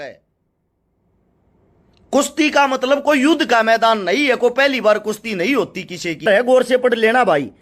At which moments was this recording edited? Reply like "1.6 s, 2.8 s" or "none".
6.2 s